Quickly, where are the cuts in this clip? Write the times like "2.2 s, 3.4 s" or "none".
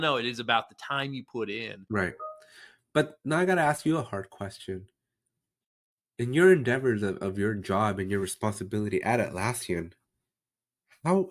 1.7 s